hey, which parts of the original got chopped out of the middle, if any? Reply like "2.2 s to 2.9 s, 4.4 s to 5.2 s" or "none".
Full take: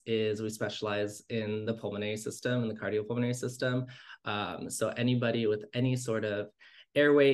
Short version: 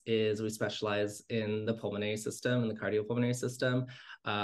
none